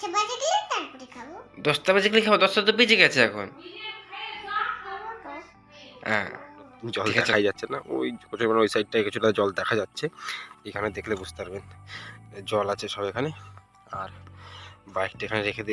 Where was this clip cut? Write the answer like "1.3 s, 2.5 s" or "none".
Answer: 6.8 s